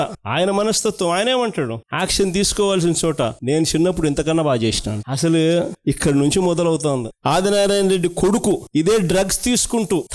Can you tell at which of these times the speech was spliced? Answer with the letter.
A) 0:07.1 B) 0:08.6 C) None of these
A